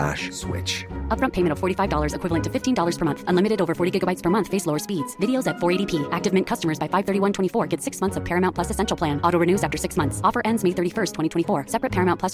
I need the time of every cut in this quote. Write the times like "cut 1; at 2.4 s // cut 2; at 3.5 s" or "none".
none